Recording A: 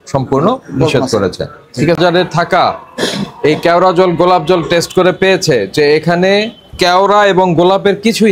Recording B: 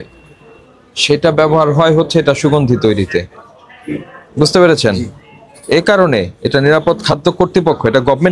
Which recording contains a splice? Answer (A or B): A